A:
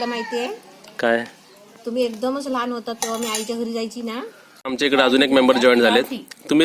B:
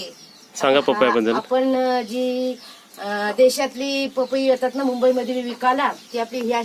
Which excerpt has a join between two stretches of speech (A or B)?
A